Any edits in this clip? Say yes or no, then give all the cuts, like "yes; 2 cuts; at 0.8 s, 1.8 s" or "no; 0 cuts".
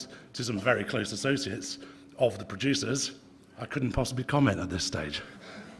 no; 0 cuts